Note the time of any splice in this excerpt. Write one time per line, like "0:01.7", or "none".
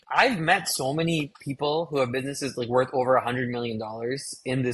none